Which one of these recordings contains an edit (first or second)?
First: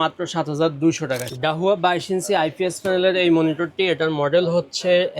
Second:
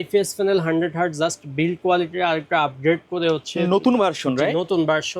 first